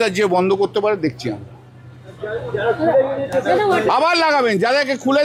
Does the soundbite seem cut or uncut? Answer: uncut